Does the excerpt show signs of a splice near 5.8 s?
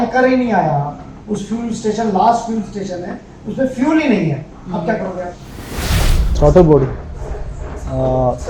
yes; 1 cut; at 5.8 s

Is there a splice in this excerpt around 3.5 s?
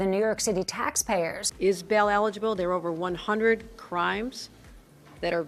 no; 1 cut; at 1.5 s

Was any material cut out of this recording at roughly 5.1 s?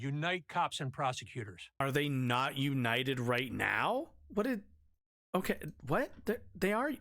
no; 1 cut; at 1.8 s

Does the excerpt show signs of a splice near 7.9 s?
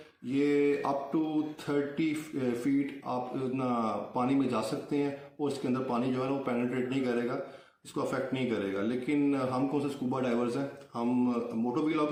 no; 0 cuts

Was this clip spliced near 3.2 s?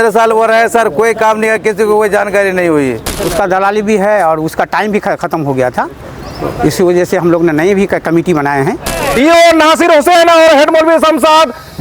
yes; 2 cuts; at 3.2 s, 9.0 s

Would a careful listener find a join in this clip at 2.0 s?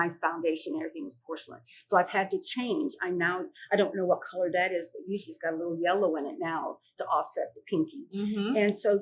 no; 0 cuts

